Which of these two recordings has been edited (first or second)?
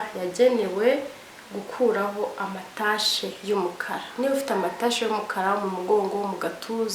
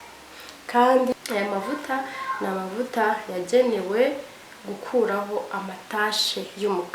second